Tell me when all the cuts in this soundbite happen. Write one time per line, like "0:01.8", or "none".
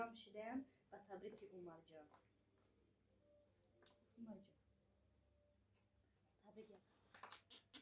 0:06.8